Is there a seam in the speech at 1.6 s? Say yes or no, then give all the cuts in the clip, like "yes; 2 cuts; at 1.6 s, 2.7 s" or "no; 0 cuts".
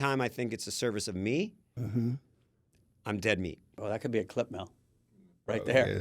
no; 1 cut; at 3.8 s